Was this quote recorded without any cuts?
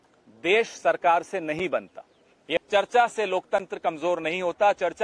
no; 1 cut; at 2.6 s

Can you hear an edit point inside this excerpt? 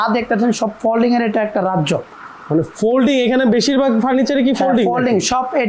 no; 0 cuts

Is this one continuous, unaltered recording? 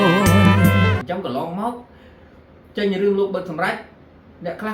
no; 1 cut; at 1.0 s

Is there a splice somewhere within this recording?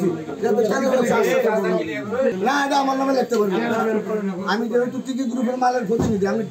yes; 1 cut; at 2.3 s

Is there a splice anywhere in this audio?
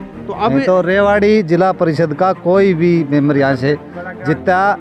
no; 0 cuts

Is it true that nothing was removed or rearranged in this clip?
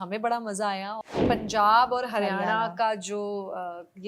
no; 1 cut; at 1.1 s

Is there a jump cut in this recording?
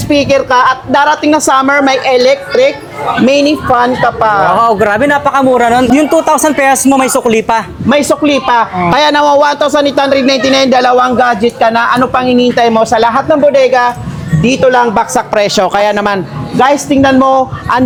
no; 0 cuts

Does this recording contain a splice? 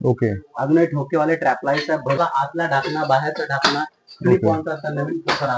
yes; 1 cut; at 2.2 s

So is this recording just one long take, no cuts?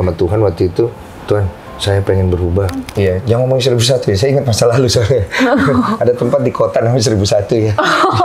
no; 1 cut; at 2.9 s

